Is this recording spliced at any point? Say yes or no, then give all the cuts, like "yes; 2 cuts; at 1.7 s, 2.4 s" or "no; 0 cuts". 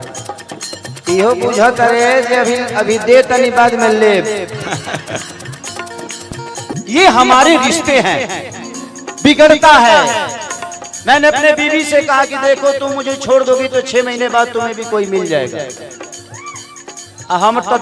yes; 1 cut; at 6.7 s